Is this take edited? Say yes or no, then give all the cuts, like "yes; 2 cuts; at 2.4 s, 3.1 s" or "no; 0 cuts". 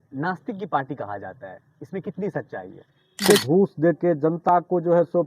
yes; 1 cut; at 3.4 s